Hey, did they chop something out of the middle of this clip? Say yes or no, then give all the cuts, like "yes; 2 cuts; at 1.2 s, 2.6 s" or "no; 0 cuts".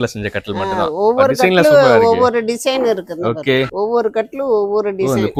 no; 0 cuts